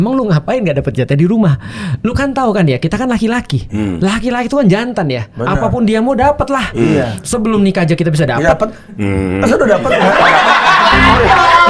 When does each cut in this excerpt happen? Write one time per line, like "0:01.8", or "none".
none